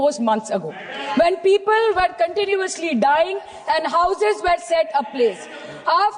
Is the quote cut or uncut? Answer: uncut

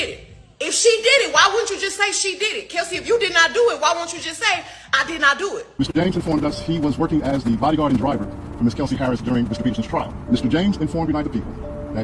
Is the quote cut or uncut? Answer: cut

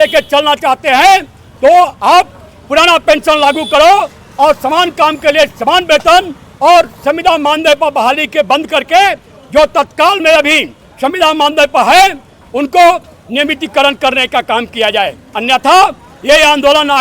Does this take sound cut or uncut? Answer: uncut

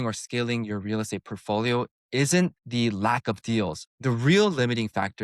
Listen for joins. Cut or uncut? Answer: cut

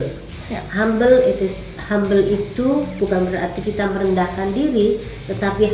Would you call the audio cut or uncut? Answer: uncut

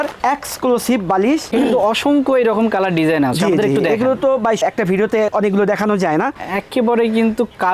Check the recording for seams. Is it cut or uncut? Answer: cut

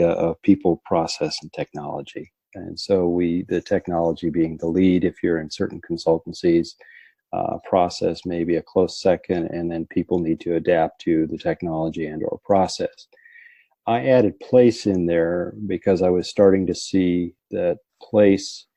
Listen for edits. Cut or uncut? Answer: cut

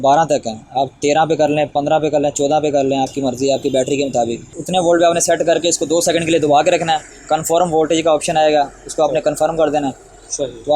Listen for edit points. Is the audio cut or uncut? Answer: cut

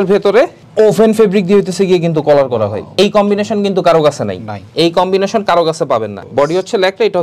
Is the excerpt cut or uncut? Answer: uncut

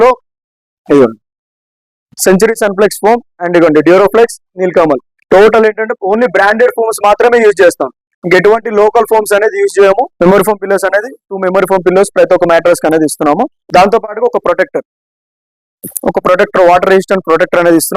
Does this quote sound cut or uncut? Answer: cut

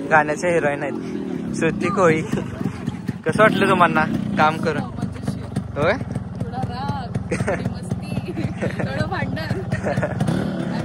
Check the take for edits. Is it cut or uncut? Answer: uncut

